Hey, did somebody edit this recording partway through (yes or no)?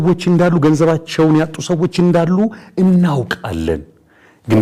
no